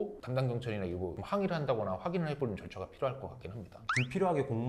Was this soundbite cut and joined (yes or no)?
no